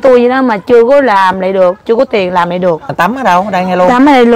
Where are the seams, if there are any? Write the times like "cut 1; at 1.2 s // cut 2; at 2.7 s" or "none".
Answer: cut 1; at 2.9 s

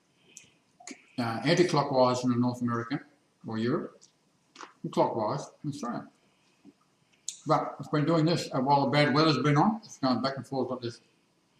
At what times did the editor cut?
cut 1; at 1.0 s

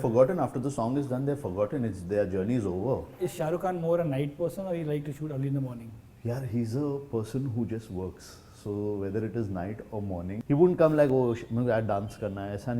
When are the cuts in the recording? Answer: cut 1; at 3.1 s // cut 2; at 10.3 s

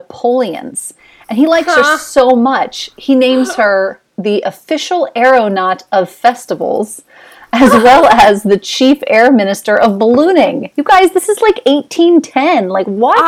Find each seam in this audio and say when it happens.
none

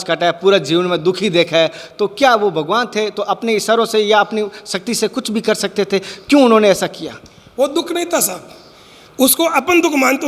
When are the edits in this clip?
none

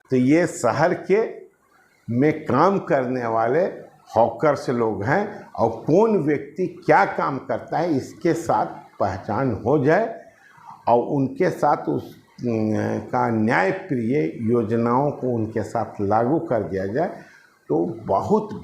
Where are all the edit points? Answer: none

